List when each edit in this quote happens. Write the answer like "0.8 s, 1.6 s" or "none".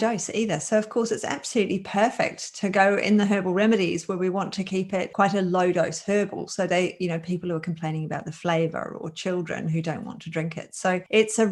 none

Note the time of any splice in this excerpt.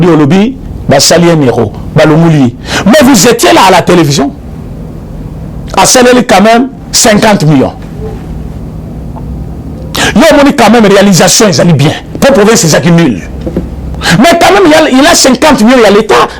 4.4 s

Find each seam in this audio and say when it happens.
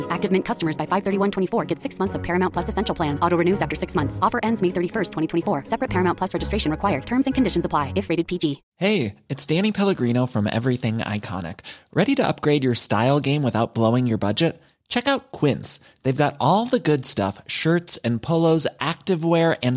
8.6 s

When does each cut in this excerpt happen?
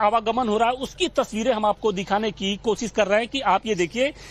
2.4 s

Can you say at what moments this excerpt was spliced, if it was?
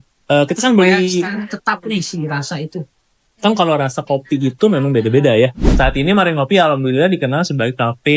5.6 s

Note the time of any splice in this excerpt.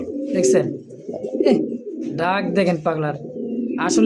none

